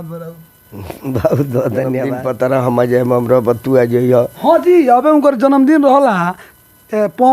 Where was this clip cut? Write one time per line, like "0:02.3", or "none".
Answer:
0:02.1